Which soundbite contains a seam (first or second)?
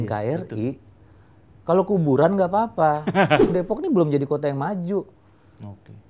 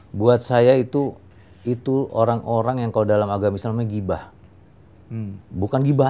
first